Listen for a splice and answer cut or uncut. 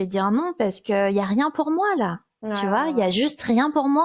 uncut